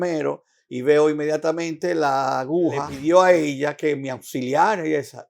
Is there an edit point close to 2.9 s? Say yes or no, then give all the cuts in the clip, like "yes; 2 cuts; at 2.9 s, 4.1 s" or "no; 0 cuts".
yes; 1 cut; at 2.9 s